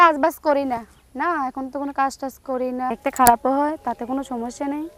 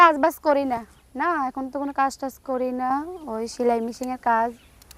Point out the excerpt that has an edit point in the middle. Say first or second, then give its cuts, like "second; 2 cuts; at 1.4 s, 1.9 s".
first; 1 cut; at 2.9 s